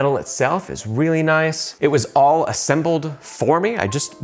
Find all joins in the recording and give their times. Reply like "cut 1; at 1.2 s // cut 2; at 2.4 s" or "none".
cut 1; at 1.7 s

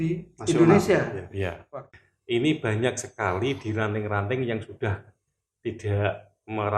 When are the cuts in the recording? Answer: cut 1; at 1.8 s

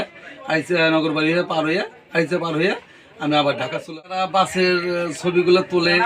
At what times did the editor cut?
cut 1; at 3.9 s

